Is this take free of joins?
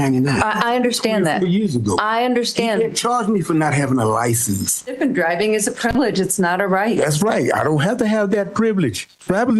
no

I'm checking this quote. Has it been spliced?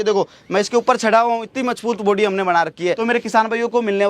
yes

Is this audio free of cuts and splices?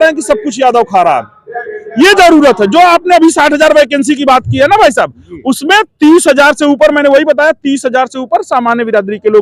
yes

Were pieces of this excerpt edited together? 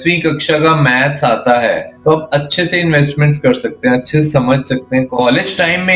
yes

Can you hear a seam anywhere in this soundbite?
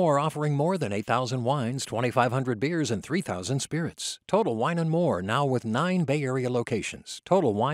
no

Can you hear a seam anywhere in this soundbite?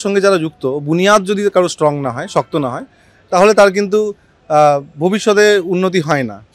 no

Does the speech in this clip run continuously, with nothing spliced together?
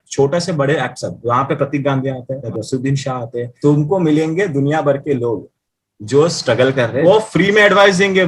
no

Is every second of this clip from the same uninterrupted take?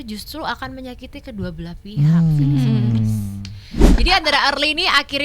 no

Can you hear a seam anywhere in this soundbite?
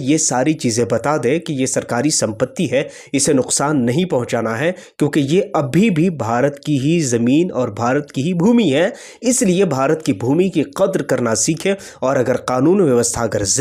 no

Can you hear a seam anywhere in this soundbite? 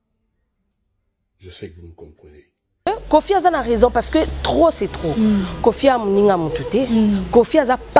yes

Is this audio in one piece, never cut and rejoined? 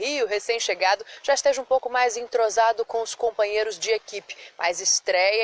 yes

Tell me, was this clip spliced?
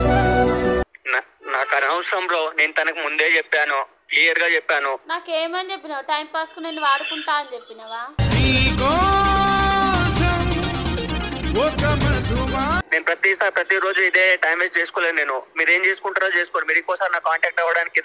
yes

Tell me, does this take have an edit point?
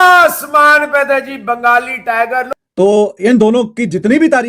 yes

